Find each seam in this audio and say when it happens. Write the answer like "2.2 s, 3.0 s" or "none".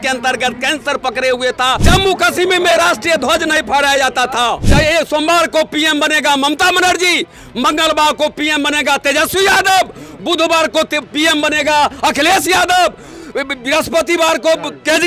1.8 s, 4.6 s